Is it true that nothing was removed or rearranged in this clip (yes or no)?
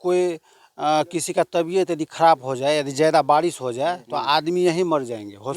yes